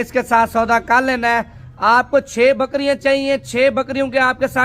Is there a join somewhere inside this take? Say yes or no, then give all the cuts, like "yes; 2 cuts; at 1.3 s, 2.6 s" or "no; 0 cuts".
no; 0 cuts